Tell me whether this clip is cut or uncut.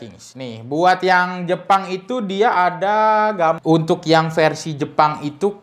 cut